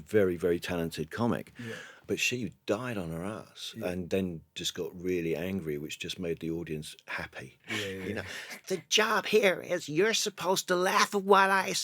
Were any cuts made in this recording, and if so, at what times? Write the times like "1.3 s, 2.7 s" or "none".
2.0 s, 7.7 s